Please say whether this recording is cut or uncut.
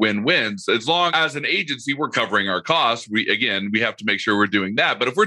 cut